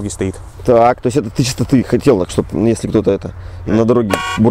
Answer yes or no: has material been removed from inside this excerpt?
no